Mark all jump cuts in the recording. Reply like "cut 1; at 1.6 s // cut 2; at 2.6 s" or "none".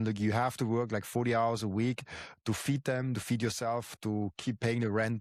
none